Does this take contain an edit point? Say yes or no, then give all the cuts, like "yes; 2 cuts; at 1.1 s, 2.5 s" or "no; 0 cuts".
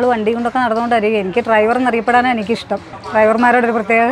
no; 0 cuts